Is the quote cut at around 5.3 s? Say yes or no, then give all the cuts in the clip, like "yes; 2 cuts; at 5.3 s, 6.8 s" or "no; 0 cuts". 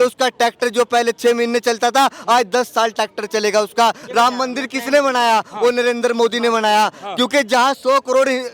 no; 1 cut; at 4.0 s